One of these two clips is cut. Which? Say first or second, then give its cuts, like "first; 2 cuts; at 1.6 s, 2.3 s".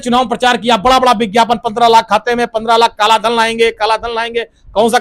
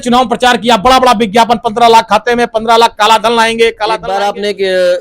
second; 1 cut; at 4.1 s